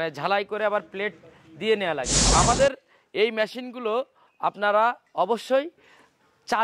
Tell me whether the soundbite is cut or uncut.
cut